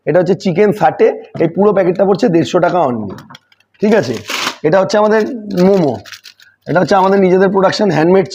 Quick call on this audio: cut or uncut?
uncut